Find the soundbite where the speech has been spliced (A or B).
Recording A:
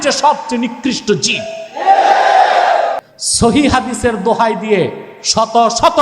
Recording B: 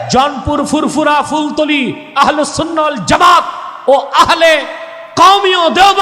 A